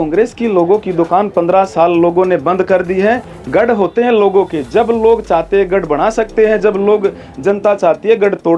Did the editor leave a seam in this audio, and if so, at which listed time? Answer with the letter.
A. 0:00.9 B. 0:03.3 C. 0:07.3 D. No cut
B